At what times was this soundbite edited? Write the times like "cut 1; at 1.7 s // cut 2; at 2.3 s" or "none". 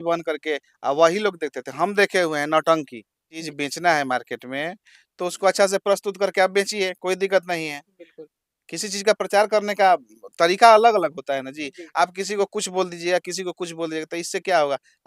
cut 1; at 3.4 s